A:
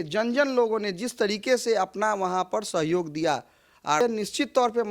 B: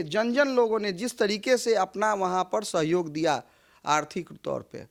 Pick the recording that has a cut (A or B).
A